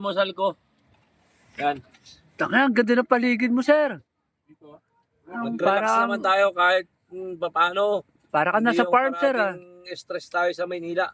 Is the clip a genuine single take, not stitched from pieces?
yes; 0 cuts

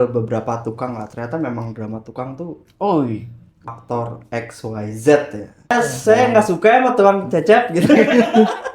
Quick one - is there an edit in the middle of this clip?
yes; 2 cuts; at 3.7 s, 5.7 s

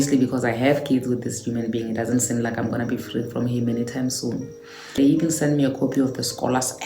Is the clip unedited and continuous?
no; 1 cut; at 5.0 s

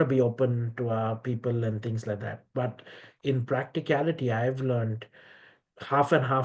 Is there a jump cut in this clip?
no; 0 cuts

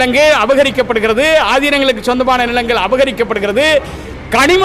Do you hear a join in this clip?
no; 0 cuts

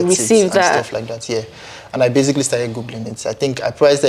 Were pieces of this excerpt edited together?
no; 0 cuts

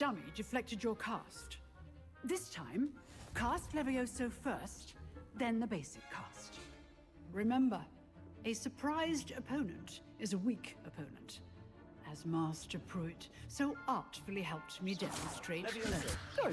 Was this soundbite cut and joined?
no; 0 cuts

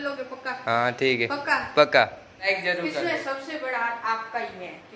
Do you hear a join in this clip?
yes; 1 cut; at 2.3 s

